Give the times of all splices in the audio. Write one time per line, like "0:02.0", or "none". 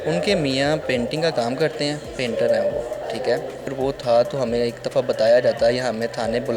0:03.7